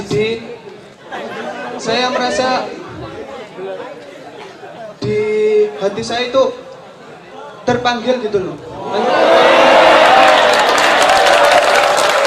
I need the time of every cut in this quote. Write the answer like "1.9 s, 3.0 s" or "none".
1.1 s